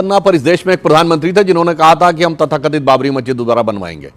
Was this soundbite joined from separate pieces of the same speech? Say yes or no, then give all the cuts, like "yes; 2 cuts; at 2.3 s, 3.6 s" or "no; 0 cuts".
no; 0 cuts